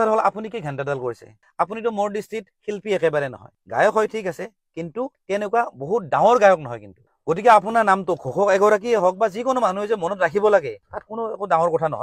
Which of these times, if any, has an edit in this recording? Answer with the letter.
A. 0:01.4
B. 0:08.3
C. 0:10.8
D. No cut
A